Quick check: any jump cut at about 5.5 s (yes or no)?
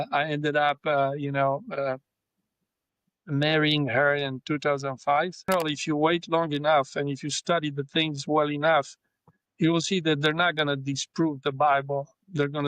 yes